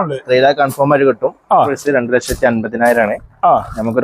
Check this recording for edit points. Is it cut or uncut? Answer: cut